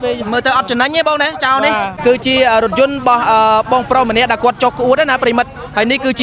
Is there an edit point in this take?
yes; 1 cut; at 1.9 s

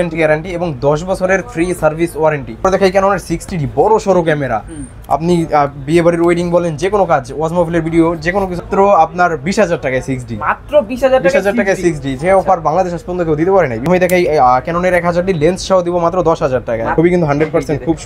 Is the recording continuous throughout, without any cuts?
no; 4 cuts; at 2.6 s, 8.6 s, 13.9 s, 16.9 s

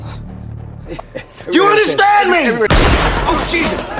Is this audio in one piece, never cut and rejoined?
no; 1 cut; at 2.7 s

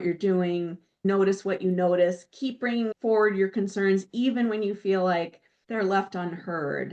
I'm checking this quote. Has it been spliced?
yes; 1 cut; at 1.0 s

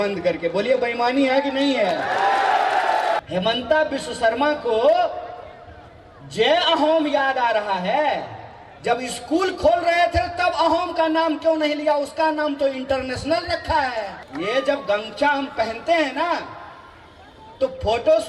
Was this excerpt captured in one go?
no; 2 cuts; at 3.2 s, 14.2 s

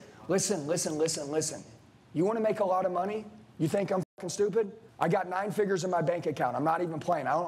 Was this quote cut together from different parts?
no; 0 cuts

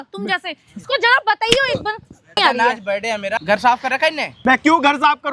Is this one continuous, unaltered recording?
no; 3 cuts; at 2.4 s, 3.4 s, 4.3 s

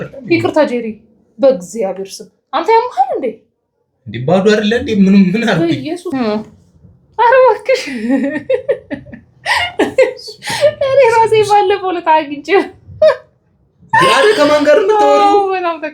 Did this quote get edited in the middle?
yes; 1 cut; at 6.1 s

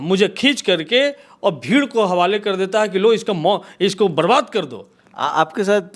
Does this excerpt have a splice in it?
no; 0 cuts

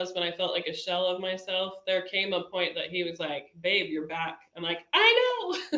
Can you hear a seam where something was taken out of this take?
no; 0 cuts

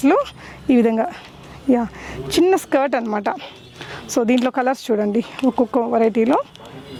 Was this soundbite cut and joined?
no; 0 cuts

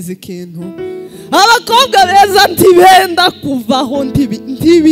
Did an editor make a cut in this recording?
yes; 1 cut; at 1.1 s

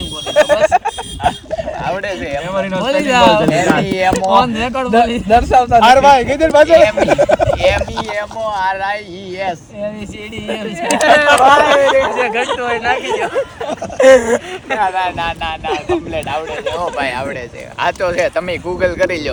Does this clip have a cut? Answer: no; 0 cuts

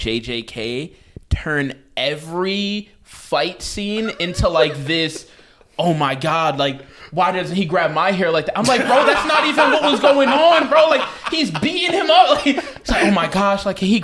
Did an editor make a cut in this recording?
no; 0 cuts

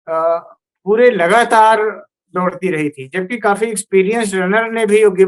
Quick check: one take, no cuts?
yes; 0 cuts

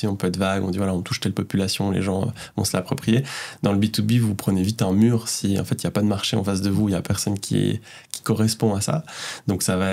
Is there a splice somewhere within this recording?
no; 0 cuts

